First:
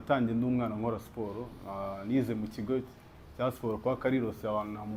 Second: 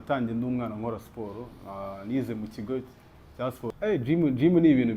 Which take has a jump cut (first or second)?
second